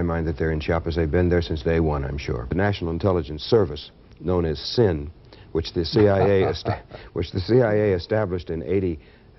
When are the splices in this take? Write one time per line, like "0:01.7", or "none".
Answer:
0:02.5